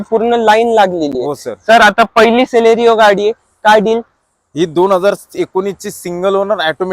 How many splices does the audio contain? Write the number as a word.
zero